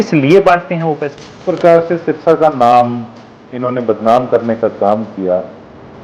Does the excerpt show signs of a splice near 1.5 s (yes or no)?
yes